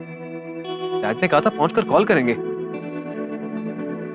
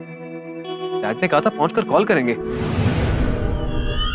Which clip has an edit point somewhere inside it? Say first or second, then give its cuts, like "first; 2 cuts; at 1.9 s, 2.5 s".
second; 1 cut; at 2.6 s